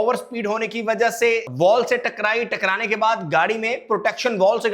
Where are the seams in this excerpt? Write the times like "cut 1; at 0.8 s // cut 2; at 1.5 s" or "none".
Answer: cut 1; at 1.5 s

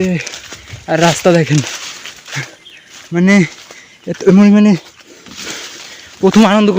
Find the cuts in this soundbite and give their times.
none

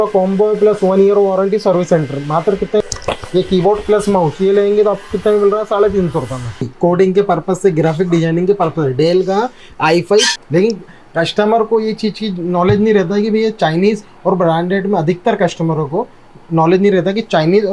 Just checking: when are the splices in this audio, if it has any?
cut 1; at 2.8 s // cut 2; at 6.7 s // cut 3; at 10.4 s

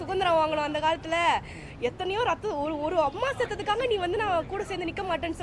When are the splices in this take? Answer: none

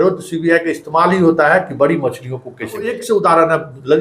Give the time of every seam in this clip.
cut 1; at 3.0 s

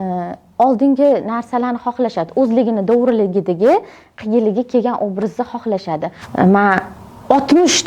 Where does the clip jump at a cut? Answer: cut 1; at 6.2 s

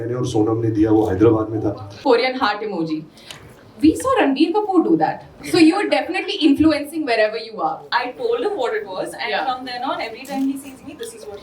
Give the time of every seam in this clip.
cut 1; at 1.9 s // cut 2; at 7.8 s

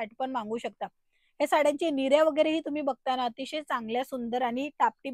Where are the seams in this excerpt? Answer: none

